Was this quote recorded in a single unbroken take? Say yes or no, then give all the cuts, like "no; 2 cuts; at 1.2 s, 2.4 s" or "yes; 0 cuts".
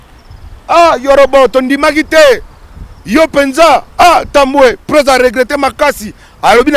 yes; 0 cuts